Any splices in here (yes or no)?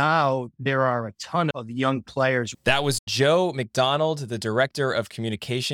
yes